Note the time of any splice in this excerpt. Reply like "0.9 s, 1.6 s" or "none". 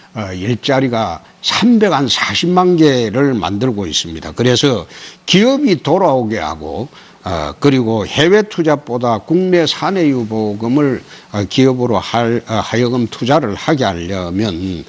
none